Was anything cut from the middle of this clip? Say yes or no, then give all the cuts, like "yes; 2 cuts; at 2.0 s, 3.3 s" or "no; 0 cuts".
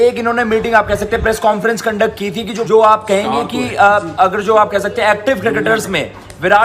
yes; 1 cut; at 2.5 s